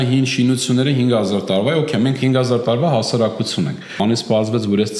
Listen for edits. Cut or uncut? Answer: cut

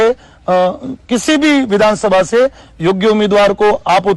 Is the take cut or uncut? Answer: uncut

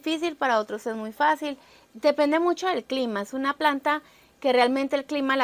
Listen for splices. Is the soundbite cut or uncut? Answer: uncut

